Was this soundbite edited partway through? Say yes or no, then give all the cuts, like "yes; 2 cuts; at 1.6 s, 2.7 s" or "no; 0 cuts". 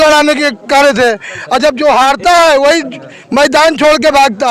no; 0 cuts